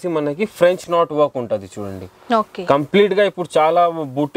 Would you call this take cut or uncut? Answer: uncut